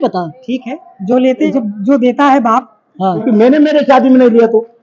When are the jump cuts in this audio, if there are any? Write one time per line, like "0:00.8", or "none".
0:01.5
0:03.2